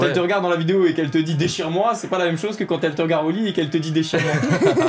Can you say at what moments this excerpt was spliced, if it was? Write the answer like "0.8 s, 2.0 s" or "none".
none